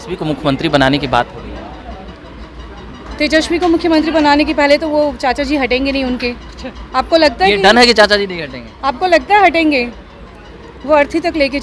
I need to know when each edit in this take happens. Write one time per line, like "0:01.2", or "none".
none